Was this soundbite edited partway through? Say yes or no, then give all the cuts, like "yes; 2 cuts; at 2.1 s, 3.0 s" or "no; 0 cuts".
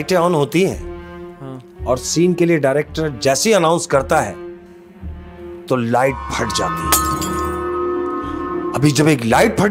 no; 0 cuts